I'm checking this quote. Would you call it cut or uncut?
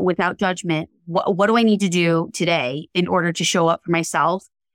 uncut